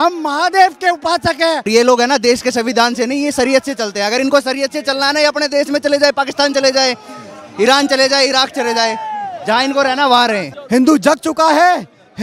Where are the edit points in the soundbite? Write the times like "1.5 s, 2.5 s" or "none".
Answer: 1.7 s, 10.5 s